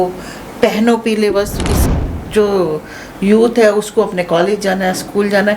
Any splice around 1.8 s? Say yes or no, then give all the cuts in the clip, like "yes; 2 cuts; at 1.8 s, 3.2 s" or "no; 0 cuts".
yes; 1 cut; at 1.8 s